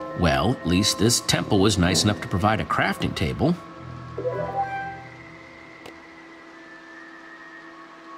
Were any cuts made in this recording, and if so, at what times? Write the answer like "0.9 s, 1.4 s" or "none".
2.6 s